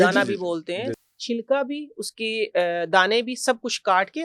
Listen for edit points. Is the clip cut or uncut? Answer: cut